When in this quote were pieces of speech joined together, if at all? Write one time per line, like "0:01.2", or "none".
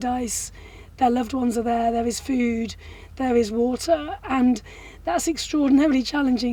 none